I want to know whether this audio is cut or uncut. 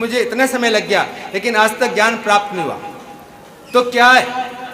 uncut